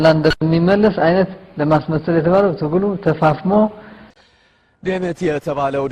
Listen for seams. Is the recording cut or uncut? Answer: cut